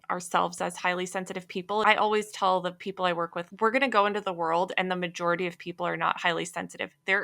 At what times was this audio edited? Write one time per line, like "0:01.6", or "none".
0:01.8
0:03.4